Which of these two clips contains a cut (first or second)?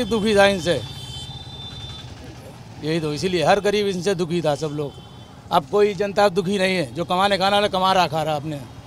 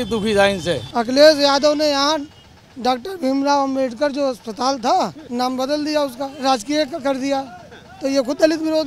second